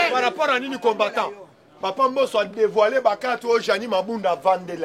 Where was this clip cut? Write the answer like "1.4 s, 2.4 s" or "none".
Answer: none